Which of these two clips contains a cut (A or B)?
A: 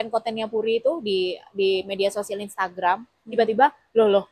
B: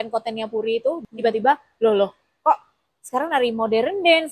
B